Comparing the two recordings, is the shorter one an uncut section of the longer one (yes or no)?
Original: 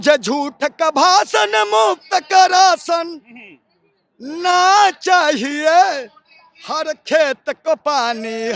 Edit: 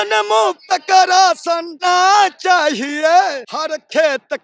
no